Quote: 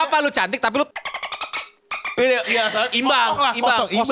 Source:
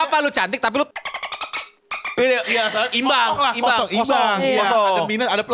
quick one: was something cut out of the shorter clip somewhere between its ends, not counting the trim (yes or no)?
no